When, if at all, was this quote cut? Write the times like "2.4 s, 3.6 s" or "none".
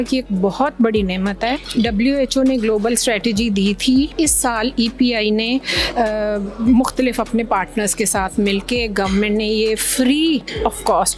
1.6 s, 4.1 s